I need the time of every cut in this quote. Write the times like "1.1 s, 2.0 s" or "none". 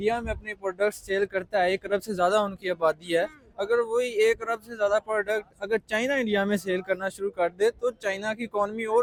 none